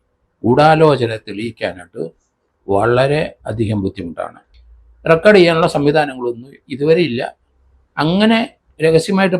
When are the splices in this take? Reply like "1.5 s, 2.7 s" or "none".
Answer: 4.6 s